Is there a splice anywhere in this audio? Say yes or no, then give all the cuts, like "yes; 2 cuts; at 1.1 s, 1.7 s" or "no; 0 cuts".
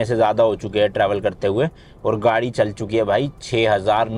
no; 0 cuts